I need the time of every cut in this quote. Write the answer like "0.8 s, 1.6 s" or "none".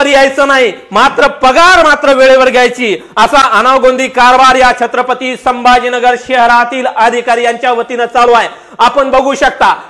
none